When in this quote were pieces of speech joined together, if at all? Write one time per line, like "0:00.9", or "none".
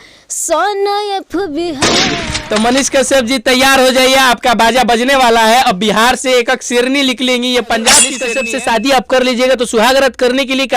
0:02.1
0:08.3